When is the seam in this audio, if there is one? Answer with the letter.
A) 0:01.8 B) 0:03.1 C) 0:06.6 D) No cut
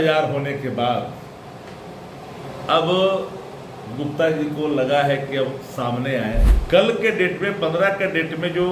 C